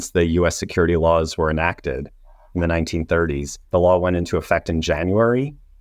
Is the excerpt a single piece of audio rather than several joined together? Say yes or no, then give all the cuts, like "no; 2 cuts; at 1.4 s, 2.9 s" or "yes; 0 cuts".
no; 1 cut; at 3.6 s